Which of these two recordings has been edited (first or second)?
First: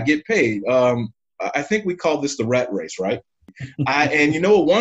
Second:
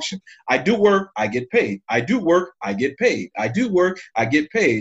first